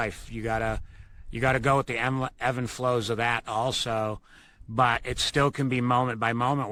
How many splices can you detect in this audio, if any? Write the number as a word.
zero